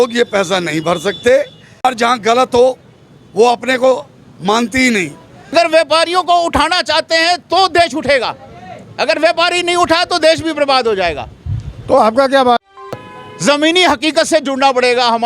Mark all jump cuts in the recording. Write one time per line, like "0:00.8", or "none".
0:01.8
0:05.5
0:13.0